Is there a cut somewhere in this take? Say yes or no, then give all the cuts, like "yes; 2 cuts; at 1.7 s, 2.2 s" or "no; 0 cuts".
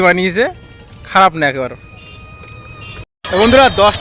yes; 1 cut; at 3.1 s